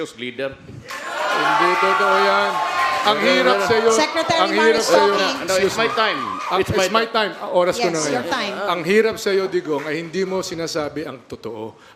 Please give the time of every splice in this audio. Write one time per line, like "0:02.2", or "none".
none